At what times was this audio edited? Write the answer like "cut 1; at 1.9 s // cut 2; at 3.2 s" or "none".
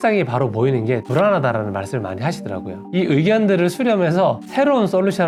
none